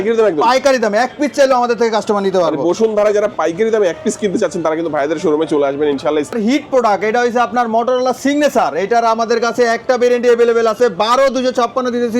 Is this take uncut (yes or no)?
no